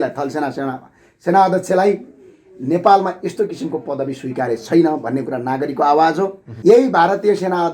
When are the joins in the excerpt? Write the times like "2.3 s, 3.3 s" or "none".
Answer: 6.5 s